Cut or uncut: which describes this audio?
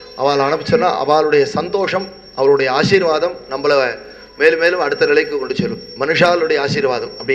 uncut